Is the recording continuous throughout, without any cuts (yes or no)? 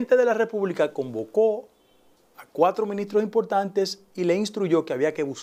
yes